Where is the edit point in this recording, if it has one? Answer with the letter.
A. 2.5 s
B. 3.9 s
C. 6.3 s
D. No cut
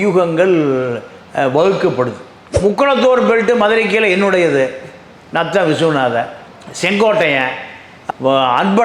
A